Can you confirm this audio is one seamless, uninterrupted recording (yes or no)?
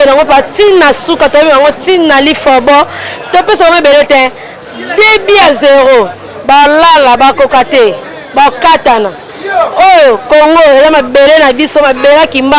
yes